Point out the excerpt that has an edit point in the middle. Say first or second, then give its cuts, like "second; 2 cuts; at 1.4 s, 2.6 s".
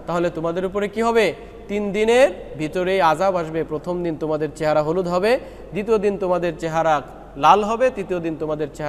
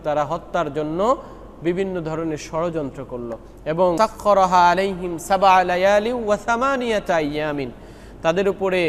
second; 1 cut; at 4.0 s